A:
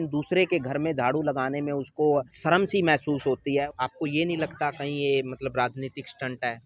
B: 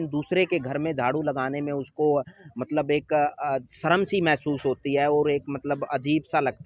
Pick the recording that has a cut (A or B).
A